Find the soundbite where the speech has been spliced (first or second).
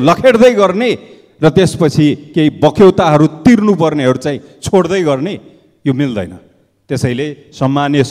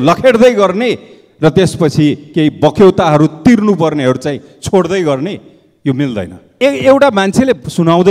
second